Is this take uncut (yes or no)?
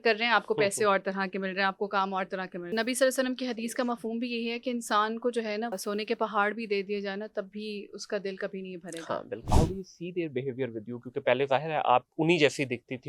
no